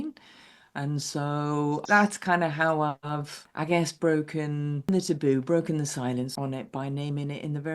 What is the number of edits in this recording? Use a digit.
2